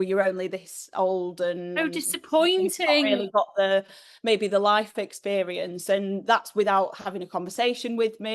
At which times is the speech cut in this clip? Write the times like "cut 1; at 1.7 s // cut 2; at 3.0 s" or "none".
none